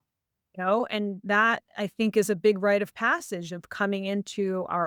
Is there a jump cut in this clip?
no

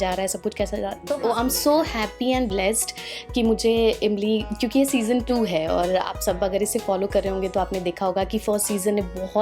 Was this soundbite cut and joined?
yes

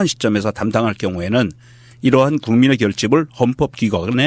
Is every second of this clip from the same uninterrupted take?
yes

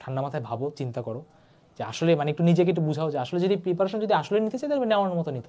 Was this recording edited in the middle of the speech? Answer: no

